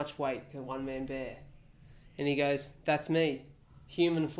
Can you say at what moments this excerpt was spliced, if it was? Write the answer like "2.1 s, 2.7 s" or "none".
none